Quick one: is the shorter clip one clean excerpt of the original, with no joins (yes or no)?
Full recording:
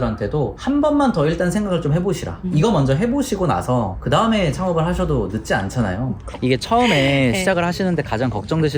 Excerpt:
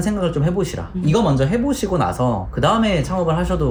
yes